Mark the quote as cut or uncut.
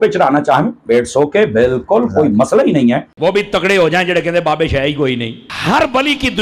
cut